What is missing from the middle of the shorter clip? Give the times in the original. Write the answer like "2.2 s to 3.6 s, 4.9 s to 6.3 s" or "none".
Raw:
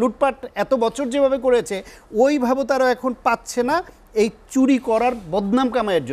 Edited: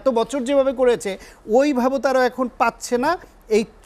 none